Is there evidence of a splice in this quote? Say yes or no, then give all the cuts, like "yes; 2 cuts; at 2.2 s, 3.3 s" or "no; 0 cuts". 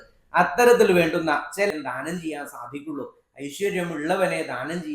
yes; 1 cut; at 1.7 s